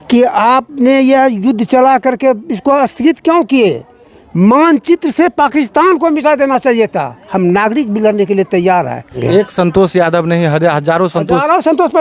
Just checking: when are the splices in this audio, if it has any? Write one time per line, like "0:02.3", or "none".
0:09.1